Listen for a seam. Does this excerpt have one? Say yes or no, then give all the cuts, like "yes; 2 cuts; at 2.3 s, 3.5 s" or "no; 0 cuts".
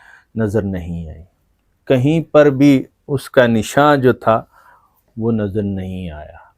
no; 0 cuts